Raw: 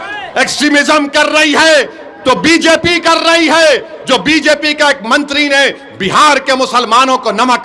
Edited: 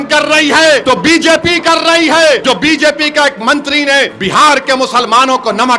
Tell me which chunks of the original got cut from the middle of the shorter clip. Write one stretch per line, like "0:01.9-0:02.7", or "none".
0:01.9-0:02.2
0:03.8-0:04.0
0:05.8-0:06.0